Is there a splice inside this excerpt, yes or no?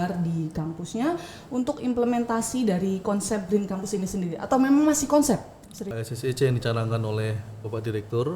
yes